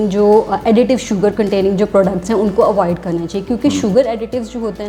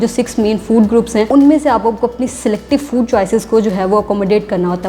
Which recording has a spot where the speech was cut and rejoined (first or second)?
second